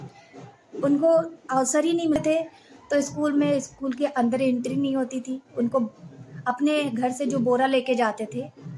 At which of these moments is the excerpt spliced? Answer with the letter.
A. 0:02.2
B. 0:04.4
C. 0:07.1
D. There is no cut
A